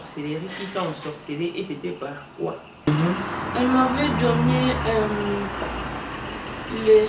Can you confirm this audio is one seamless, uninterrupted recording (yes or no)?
no